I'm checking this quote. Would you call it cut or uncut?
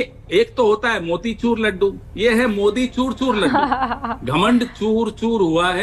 uncut